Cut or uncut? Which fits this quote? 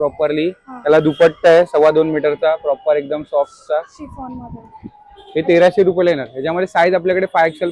uncut